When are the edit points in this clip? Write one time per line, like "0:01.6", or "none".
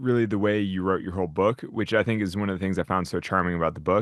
none